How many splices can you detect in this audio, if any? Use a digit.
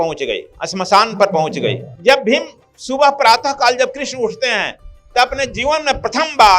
1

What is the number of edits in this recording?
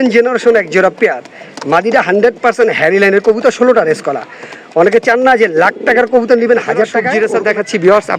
1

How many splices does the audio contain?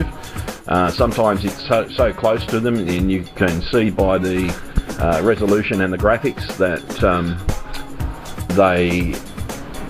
1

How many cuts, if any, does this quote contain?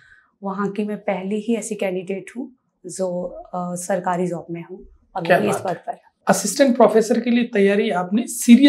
1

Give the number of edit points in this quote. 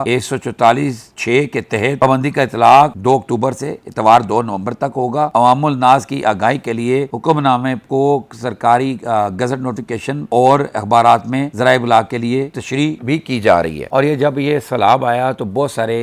2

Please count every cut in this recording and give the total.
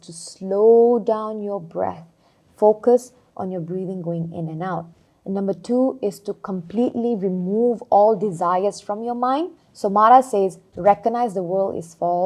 2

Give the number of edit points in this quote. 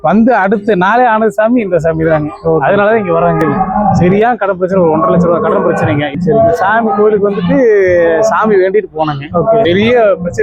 3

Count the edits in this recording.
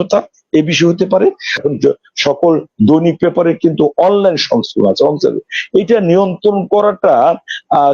1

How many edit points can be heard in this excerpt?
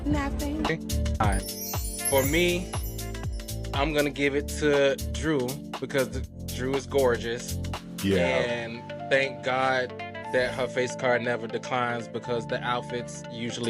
1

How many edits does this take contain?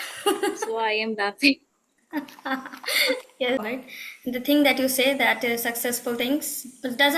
1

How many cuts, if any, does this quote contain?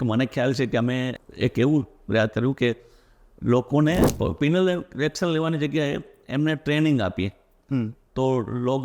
2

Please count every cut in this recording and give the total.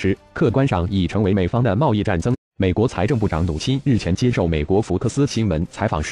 0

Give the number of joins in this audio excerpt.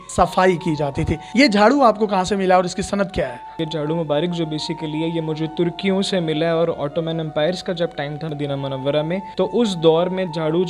0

